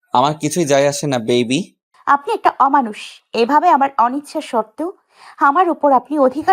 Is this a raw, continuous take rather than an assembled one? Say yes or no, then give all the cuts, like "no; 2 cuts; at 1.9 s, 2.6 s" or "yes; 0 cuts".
no; 1 cut; at 1.9 s